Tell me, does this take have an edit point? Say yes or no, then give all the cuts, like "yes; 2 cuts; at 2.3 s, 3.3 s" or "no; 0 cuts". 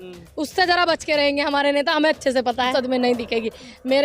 yes; 1 cut; at 2.7 s